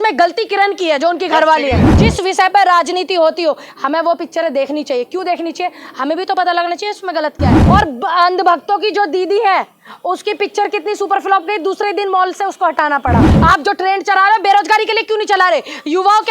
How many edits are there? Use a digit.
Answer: 3